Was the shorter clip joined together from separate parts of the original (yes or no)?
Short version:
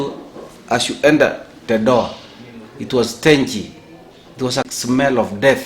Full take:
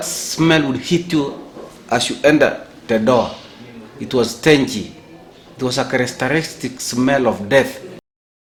yes